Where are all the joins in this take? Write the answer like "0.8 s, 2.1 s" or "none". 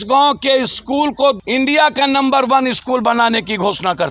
1.4 s